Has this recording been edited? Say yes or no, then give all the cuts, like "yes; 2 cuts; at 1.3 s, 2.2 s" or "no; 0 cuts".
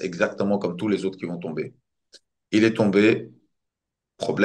no; 0 cuts